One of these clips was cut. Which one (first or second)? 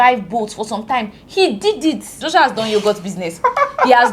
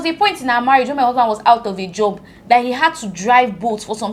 first